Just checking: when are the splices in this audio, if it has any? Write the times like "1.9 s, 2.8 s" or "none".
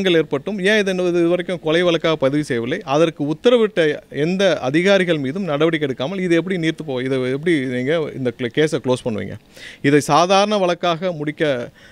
none